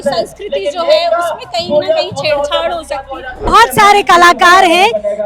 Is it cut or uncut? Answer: cut